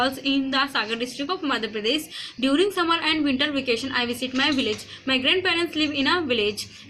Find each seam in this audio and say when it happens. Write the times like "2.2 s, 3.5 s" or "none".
none